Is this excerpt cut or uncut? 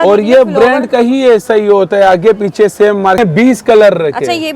cut